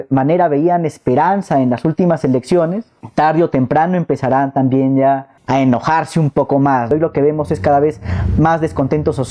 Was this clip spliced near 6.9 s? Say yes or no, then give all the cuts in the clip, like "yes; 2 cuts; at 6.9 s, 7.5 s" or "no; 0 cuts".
yes; 1 cut; at 6.9 s